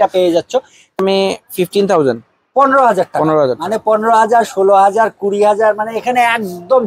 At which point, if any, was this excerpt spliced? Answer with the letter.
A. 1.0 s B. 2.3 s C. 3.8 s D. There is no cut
A